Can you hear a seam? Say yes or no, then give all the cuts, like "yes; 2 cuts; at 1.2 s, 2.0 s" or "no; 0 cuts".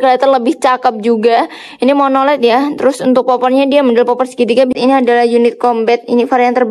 yes; 1 cut; at 4.8 s